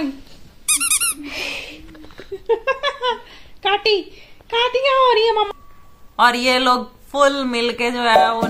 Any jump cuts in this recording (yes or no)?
yes